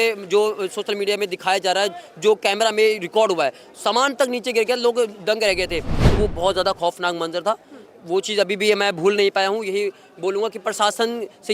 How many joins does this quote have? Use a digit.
1